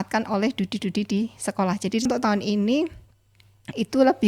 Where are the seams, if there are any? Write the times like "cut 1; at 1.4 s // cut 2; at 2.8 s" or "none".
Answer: cut 1; at 2.1 s